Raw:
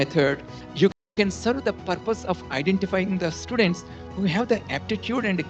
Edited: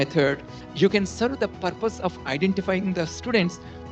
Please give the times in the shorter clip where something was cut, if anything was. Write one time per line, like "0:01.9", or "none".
0:00.9

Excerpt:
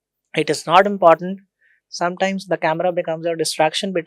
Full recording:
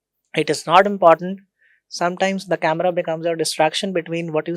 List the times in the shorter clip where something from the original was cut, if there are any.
none

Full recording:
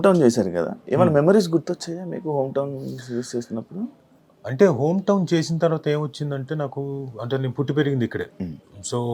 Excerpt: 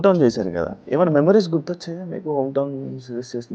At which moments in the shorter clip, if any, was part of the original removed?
none

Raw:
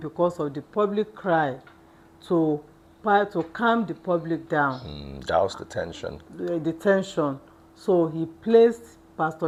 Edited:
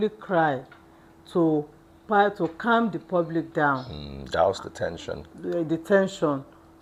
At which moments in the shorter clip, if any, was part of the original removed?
none

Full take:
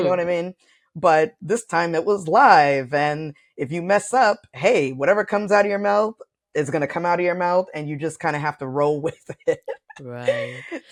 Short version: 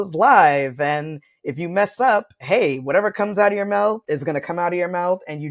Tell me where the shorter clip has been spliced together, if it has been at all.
0:04.0

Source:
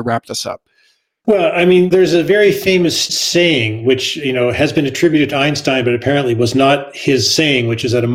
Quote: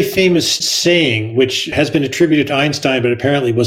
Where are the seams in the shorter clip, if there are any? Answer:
0:01.7

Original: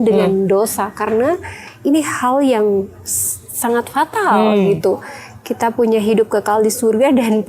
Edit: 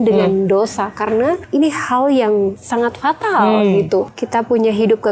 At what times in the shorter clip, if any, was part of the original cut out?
0:01.4
0:02.6
0:04.2

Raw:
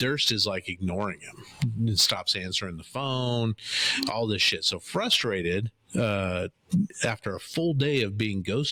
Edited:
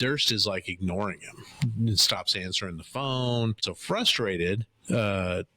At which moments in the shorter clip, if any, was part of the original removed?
0:03.7

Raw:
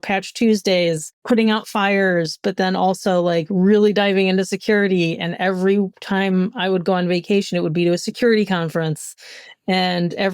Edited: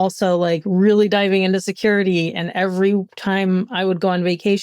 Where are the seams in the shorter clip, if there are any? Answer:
none

